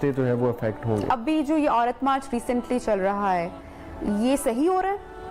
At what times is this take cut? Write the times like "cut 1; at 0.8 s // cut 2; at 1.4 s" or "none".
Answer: none